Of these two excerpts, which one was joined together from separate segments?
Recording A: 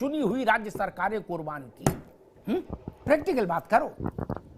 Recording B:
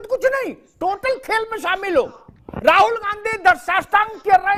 A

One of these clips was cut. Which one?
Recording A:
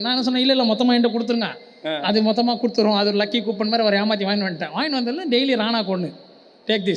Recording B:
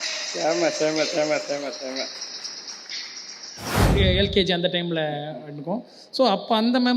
B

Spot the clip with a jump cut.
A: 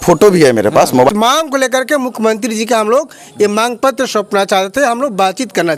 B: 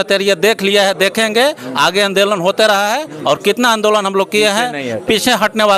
A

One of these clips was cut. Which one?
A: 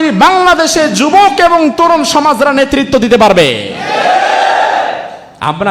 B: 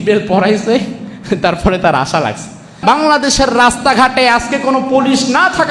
B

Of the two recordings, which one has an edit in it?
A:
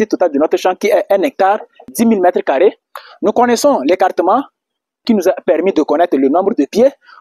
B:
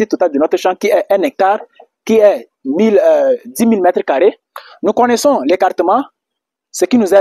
A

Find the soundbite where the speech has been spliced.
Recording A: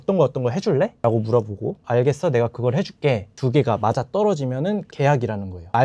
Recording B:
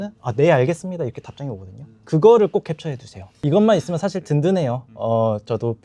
A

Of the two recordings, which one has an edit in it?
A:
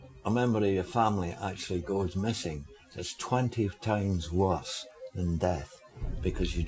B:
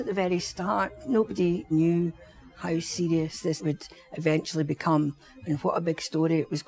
B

